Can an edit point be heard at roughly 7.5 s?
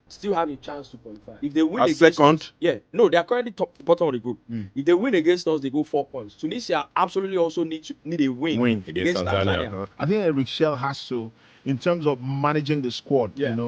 no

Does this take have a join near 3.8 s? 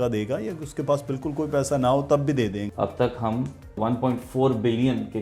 yes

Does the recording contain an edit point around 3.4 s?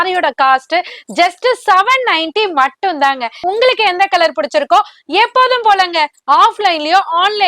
yes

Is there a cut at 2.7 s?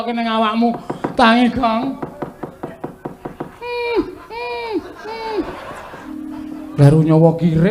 no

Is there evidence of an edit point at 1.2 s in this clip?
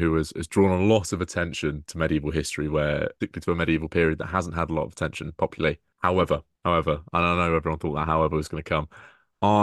no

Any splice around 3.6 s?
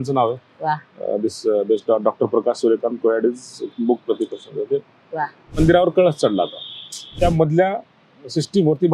no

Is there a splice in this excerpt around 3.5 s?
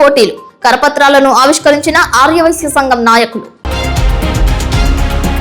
yes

